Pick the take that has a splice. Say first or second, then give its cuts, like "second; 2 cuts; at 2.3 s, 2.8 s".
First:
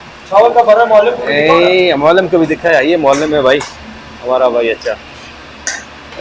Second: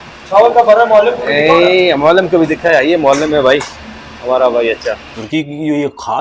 second; 1 cut; at 5.2 s